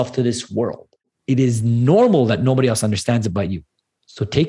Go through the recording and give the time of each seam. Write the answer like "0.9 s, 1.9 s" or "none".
1.1 s